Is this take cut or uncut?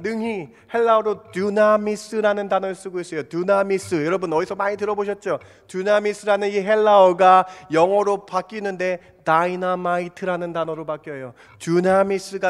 uncut